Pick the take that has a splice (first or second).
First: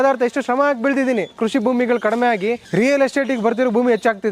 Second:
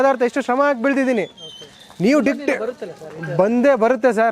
first